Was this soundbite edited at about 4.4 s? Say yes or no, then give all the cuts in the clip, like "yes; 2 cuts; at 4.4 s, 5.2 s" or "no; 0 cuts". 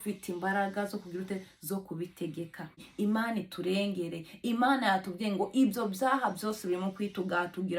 no; 1 cut; at 2.9 s